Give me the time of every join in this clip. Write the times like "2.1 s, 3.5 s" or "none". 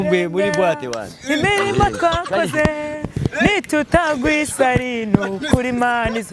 none